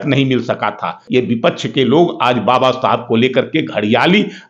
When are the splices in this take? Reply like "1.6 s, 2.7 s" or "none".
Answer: 1.0 s